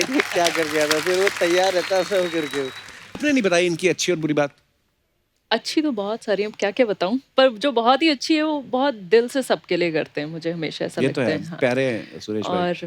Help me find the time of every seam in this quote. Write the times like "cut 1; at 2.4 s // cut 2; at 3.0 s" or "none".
cut 1; at 3.2 s